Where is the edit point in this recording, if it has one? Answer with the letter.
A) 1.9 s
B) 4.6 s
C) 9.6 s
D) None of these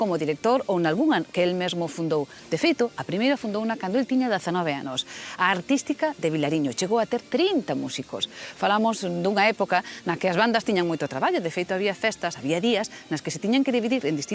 C